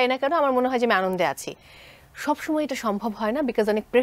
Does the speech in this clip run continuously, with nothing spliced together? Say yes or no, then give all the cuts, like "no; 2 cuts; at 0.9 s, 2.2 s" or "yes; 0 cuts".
yes; 0 cuts